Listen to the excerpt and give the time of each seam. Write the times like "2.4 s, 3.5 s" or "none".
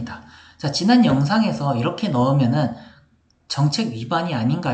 none